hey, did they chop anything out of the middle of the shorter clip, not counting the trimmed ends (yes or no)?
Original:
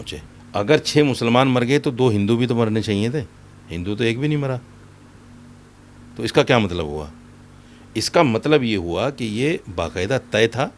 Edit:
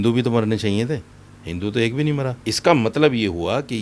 yes